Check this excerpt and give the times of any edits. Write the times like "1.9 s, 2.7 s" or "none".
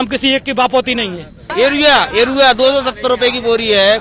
1.4 s